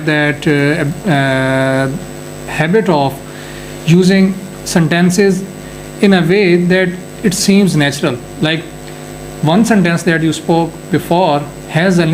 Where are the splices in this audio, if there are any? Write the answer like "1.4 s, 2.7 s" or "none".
none